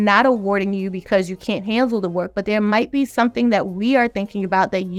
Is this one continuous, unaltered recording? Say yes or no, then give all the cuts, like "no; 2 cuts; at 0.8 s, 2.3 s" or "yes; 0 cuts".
yes; 0 cuts